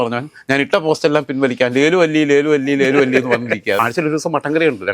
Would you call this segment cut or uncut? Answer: cut